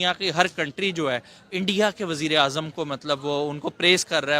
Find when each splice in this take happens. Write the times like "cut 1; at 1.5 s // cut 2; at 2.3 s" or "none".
none

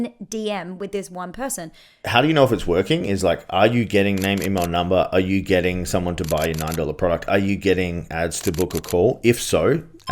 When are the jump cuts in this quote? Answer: cut 1; at 2.0 s

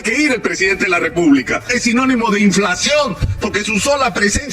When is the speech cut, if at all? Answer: cut 1; at 1.7 s

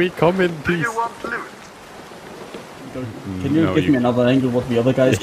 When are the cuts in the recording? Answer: cut 1; at 3.1 s

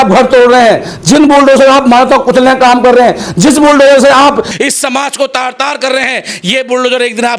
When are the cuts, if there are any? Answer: none

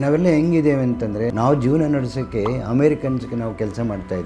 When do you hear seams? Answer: cut 1; at 1.3 s

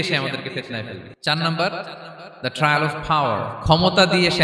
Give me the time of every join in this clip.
cut 1; at 1.0 s

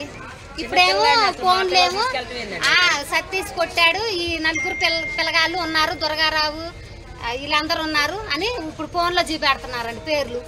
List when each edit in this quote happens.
none

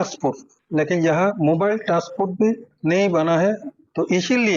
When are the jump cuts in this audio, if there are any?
none

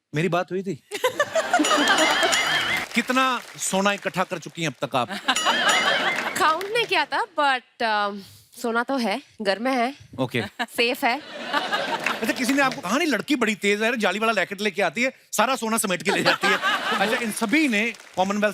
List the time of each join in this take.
cut 1; at 2.8 s // cut 2; at 16.9 s

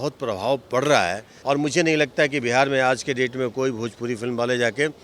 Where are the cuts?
cut 1; at 1.3 s

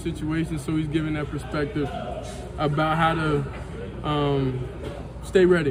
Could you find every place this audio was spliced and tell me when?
none

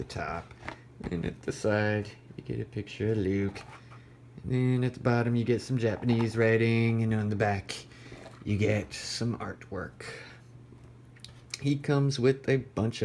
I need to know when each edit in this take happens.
cut 1; at 10.3 s

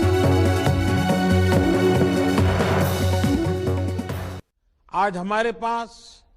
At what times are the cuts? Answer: cut 1; at 4.3 s

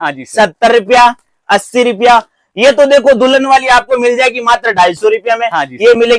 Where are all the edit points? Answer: none

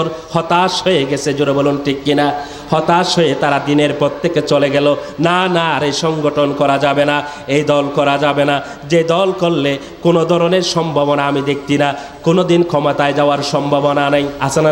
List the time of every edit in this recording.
none

